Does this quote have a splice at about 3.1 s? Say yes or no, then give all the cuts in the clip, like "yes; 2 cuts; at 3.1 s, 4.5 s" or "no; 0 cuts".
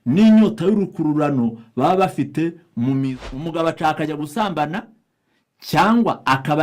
yes; 1 cut; at 3.1 s